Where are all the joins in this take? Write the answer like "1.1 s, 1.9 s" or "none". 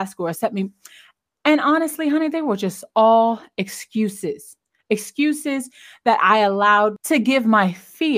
7.0 s